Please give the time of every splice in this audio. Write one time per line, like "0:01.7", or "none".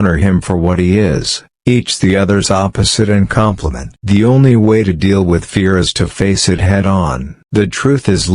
0:03.9
0:07.3